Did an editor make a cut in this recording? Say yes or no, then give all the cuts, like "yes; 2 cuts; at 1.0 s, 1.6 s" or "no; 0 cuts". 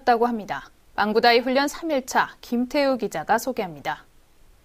no; 0 cuts